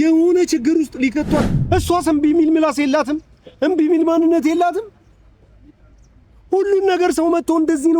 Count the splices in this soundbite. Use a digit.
1